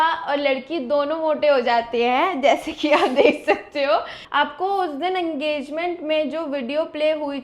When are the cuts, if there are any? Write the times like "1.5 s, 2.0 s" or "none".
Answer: 4.2 s